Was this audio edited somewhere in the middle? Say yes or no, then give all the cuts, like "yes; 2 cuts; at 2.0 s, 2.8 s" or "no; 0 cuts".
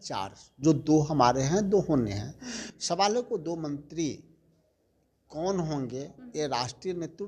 no; 0 cuts